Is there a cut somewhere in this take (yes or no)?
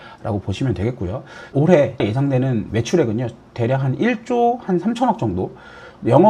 yes